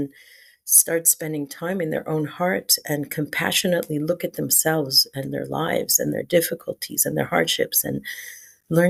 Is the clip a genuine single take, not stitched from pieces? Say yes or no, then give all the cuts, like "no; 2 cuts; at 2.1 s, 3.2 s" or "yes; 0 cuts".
yes; 0 cuts